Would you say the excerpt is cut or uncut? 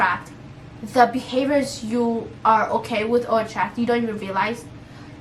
uncut